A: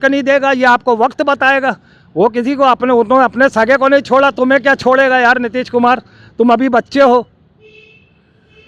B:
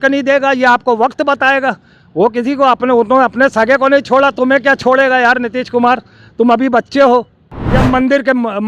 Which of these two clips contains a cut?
B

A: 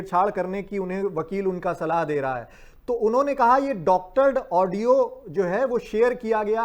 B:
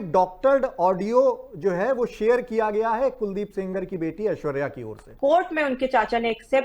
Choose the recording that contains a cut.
B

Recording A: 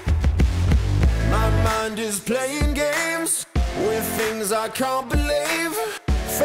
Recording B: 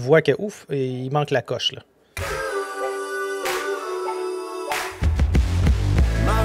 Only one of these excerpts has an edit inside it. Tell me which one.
B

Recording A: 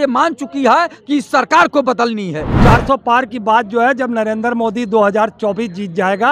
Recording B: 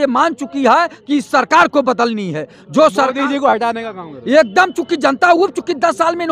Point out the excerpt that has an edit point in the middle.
A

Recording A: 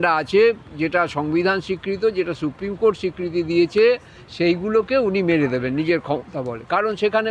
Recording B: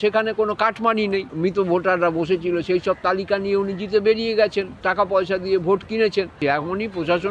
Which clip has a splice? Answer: B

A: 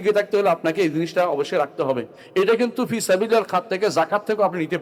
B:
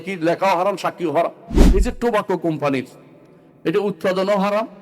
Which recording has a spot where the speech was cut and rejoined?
B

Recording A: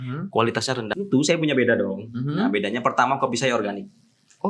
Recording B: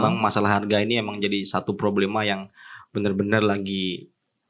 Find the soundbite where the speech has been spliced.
A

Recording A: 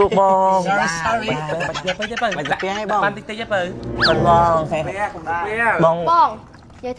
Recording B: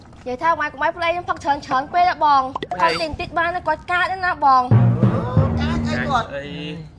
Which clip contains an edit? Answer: A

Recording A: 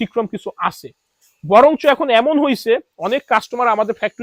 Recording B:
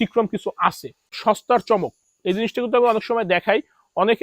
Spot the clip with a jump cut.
B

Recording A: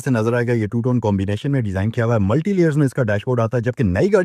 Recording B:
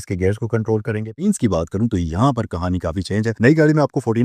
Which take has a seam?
B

